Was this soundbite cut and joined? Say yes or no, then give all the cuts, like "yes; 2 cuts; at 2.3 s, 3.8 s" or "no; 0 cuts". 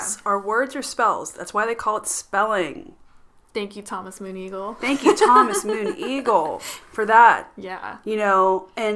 no; 0 cuts